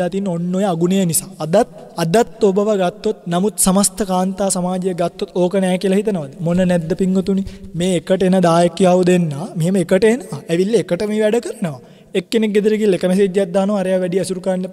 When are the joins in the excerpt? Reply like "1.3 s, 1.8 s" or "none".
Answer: 1.9 s, 3.2 s

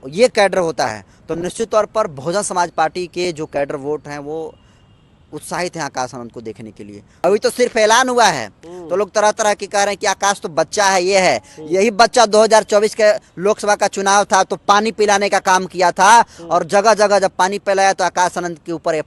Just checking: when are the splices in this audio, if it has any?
7.2 s

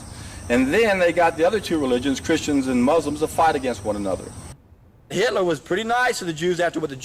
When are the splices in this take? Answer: 4.5 s

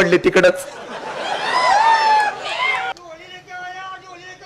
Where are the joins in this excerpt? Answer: 2.9 s

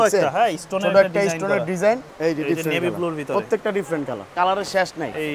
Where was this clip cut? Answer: 2.1 s, 4.2 s

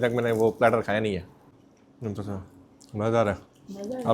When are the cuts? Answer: 1.3 s

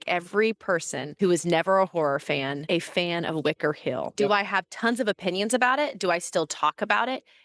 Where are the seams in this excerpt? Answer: 1.0 s, 2.6 s, 4.1 s

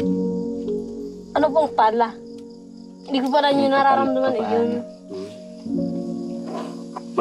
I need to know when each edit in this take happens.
1.0 s

